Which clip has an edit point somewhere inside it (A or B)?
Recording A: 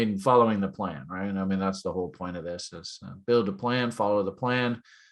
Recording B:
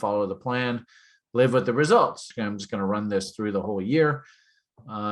B